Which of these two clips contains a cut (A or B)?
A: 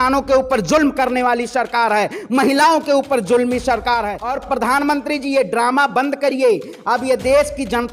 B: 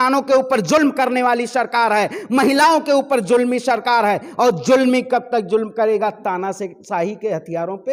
A